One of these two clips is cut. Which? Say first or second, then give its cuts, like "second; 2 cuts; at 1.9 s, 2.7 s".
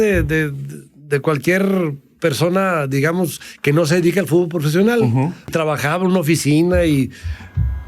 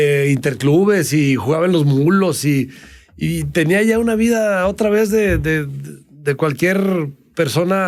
first; 1 cut; at 5.5 s